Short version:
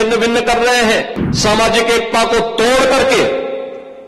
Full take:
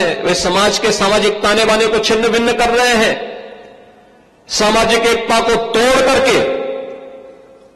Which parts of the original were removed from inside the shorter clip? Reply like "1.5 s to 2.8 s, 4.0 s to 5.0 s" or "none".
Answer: 3.3 s to 4.4 s